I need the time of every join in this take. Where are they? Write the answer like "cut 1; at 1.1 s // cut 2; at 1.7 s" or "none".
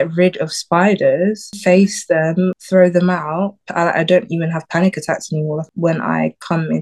cut 1; at 1.5 s // cut 2; at 2.6 s // cut 3; at 3.6 s // cut 4; at 5.7 s